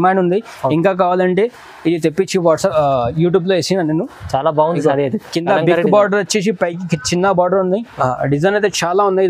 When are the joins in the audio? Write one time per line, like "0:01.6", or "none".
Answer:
0:07.9